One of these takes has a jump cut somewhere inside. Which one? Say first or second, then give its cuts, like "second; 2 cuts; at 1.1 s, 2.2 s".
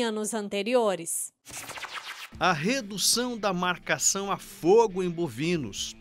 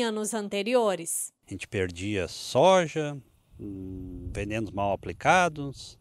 first; 1 cut; at 1.7 s